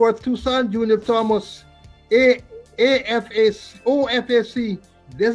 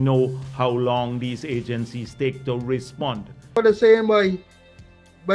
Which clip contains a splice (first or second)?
second